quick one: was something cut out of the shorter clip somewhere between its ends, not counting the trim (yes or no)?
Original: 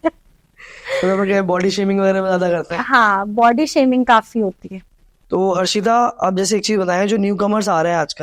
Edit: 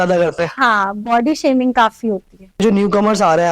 yes